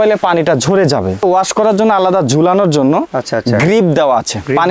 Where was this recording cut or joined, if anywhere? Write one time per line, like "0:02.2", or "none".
0:01.2